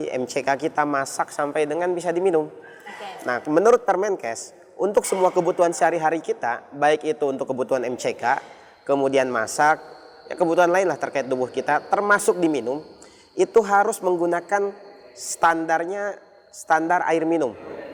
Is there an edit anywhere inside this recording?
no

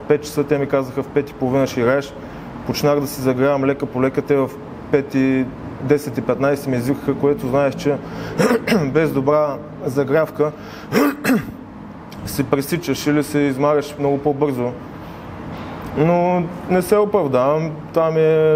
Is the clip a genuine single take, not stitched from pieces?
yes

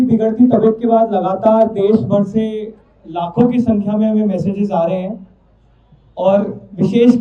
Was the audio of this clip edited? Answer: no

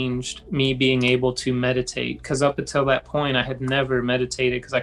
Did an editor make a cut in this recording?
no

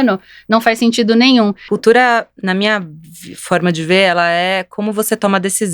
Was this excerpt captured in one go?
no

